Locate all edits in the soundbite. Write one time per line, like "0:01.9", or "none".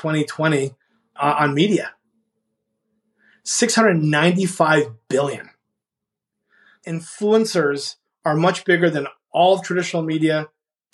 0:06.6